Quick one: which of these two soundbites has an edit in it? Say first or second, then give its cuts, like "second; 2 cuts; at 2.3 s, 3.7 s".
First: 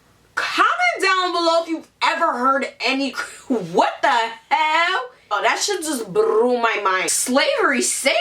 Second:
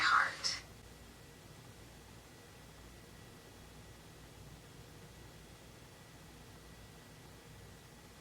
first; 1 cut; at 7.1 s